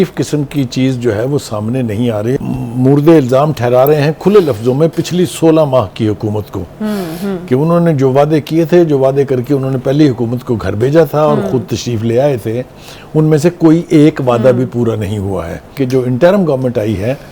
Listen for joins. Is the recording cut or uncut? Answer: cut